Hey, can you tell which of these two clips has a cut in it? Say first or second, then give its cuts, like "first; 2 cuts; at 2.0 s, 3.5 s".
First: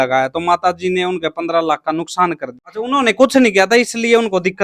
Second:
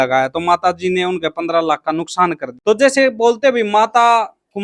second; 1 cut; at 2.5 s